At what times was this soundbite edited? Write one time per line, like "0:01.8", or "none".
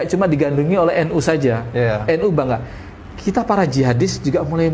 none